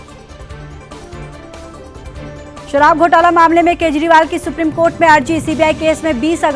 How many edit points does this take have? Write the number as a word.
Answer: one